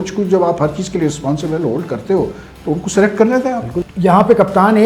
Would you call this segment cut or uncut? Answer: cut